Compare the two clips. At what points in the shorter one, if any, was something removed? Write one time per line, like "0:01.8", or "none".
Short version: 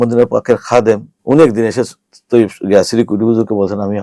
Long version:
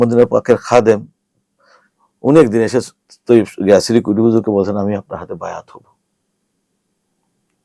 0:01.1

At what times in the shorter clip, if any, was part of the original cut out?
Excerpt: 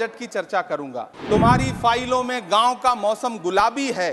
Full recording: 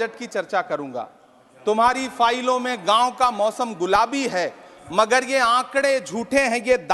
0:01.1

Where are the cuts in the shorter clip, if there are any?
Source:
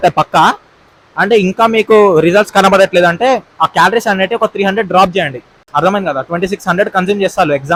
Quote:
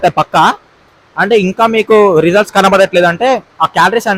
none

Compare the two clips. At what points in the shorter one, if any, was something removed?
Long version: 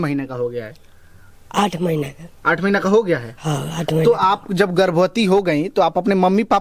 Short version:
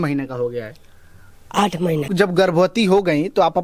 0:02.1

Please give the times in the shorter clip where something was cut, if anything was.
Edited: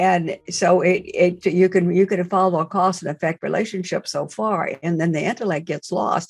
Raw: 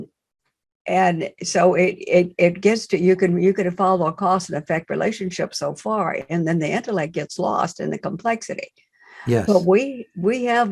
0:01.4

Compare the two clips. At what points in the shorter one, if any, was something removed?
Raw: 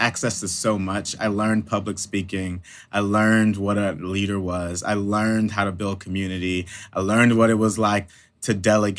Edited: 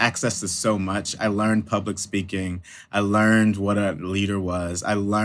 none

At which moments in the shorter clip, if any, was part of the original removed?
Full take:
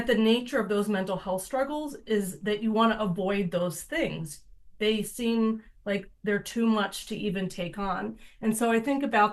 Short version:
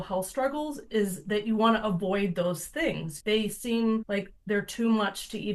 0:03.1
0:04.1

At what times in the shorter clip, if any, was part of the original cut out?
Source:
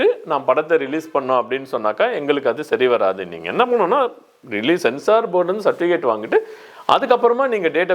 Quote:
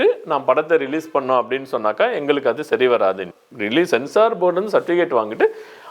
0:03.4

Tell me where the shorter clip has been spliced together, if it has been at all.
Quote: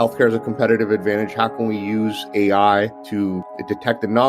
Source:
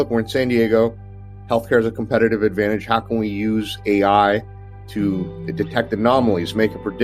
0:03.4

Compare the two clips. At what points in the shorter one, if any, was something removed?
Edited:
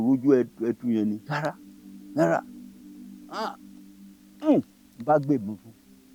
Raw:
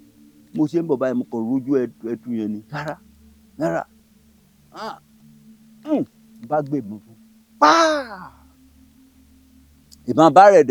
none

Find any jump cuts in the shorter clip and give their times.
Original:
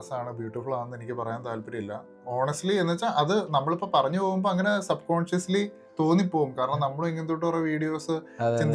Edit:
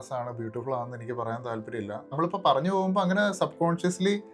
0:02.2

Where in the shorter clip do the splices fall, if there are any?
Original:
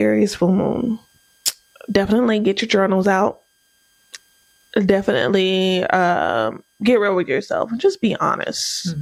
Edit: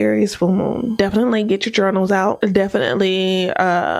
0:00.9
0:02.4

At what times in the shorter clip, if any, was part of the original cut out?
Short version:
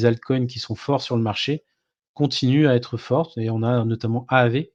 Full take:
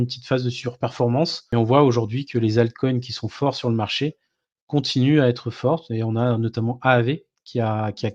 none

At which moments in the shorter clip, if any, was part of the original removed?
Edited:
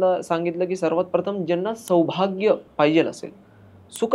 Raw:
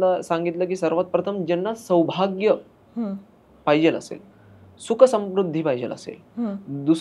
0:02.7

